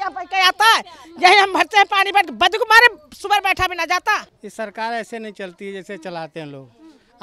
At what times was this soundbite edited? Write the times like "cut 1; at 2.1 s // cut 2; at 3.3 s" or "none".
cut 1; at 4.4 s